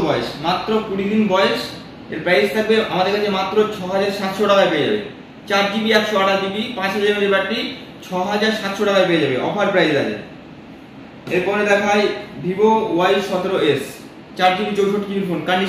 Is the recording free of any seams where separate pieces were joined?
yes; 0 cuts

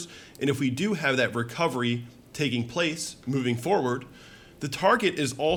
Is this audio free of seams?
yes; 0 cuts

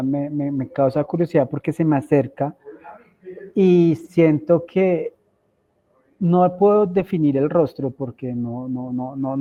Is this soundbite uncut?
yes; 0 cuts

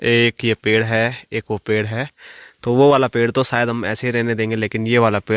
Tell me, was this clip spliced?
no; 0 cuts

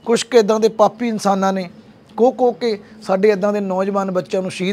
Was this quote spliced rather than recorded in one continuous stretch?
no; 0 cuts

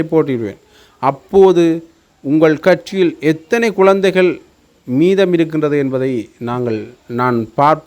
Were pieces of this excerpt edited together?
no; 0 cuts

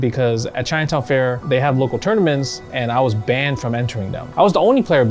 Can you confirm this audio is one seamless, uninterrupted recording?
no; 2 cuts; at 1.4 s, 4.1 s

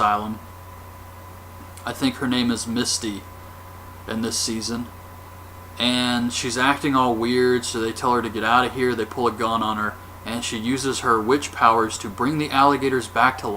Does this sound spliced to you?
yes; 1 cut; at 5.1 s

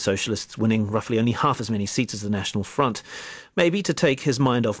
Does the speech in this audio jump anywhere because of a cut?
no; 0 cuts

